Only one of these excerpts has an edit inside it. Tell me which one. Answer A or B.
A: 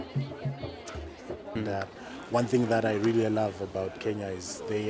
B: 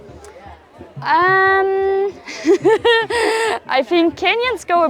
A